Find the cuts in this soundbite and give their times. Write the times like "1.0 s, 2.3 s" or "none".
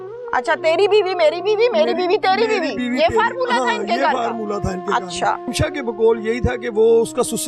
5.5 s